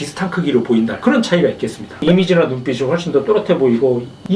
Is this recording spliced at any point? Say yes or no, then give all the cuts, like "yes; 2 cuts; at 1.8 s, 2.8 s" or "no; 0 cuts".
yes; 1 cut; at 1.8 s